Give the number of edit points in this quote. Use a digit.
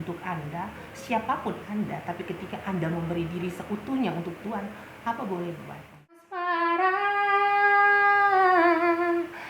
1